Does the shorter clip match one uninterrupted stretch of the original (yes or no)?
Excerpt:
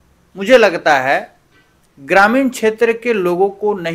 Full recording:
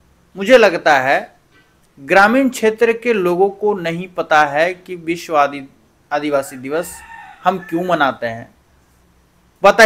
yes